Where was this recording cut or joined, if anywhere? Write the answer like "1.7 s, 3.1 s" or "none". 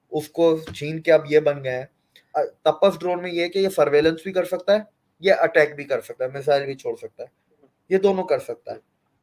2.3 s